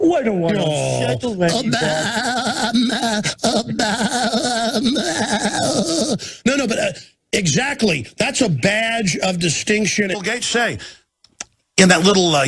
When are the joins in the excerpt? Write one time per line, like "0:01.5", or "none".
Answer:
none